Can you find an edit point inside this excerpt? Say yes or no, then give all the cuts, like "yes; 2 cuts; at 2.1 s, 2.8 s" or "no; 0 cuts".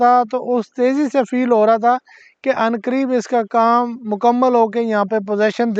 no; 0 cuts